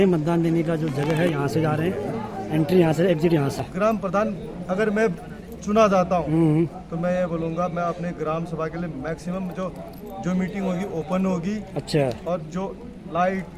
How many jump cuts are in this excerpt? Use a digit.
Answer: 1